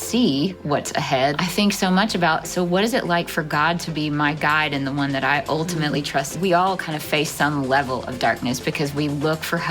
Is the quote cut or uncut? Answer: cut